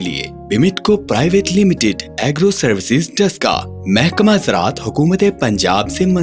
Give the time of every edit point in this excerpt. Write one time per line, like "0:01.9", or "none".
none